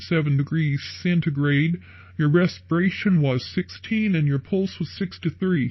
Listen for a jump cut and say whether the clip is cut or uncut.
uncut